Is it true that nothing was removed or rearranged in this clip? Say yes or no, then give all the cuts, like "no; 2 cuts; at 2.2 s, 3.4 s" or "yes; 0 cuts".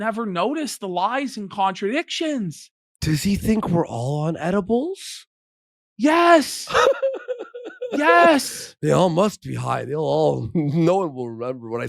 yes; 0 cuts